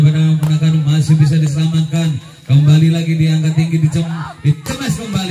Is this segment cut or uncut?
uncut